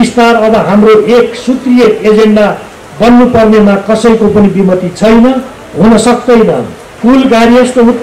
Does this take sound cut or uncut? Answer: cut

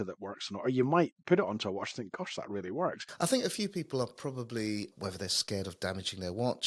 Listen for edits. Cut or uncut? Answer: cut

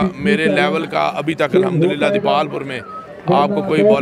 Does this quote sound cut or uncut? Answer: uncut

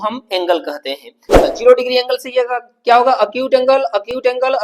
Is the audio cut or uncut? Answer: cut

